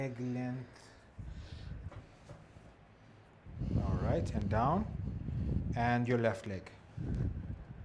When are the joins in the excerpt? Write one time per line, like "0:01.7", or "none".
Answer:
0:01.9

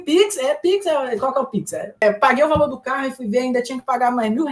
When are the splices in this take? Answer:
0:02.0

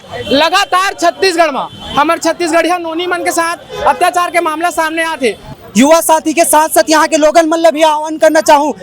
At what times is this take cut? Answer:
0:05.5

